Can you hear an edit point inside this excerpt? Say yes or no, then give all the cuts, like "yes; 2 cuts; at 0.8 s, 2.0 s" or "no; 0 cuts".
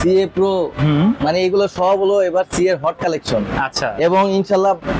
no; 0 cuts